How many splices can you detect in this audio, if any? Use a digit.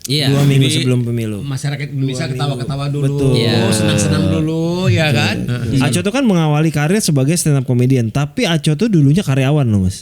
1